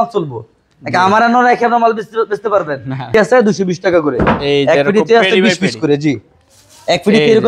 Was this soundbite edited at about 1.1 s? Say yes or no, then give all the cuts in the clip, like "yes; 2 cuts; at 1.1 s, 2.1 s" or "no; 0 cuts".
no; 1 cut; at 3.1 s